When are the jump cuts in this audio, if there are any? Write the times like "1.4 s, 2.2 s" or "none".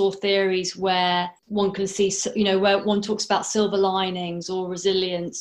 1.4 s